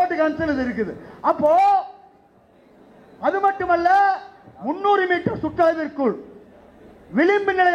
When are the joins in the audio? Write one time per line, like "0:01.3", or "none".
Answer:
none